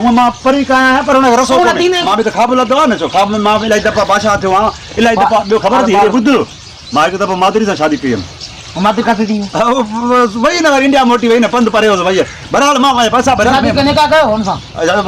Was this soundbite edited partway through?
yes; 1 cut; at 2.0 s

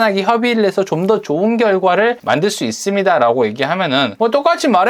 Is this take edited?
yes; 2 cuts; at 2.2 s, 4.1 s

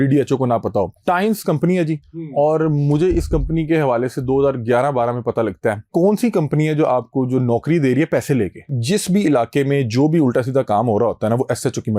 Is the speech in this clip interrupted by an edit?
yes; 3 cuts; at 1.0 s, 5.9 s, 8.8 s

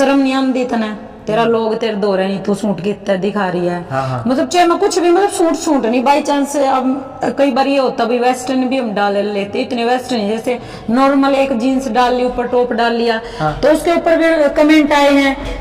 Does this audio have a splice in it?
no; 0 cuts

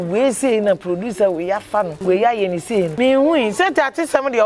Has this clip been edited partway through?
yes; 2 cuts; at 1.9 s, 2.9 s

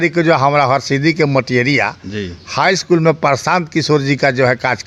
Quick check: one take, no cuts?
yes; 0 cuts

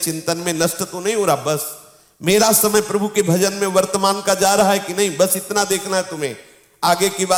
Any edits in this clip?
no; 0 cuts

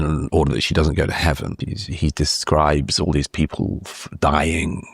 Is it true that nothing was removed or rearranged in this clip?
no; 1 cut; at 1.5 s

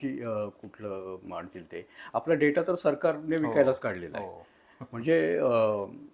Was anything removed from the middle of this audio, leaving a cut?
no; 0 cuts

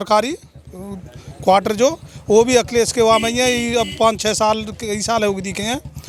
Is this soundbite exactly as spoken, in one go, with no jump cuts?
yes; 0 cuts

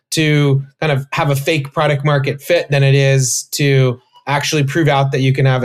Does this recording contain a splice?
no; 0 cuts

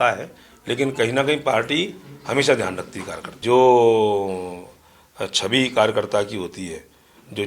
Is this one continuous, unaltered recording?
no; 1 cut; at 3.4 s

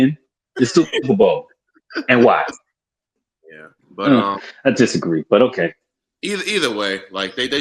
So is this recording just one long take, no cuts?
no; 1 cut; at 3.2 s

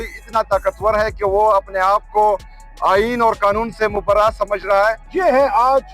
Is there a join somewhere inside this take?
yes; 1 cut; at 5.0 s

